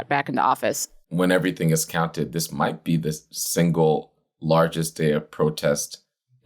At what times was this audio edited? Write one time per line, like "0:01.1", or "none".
0:01.0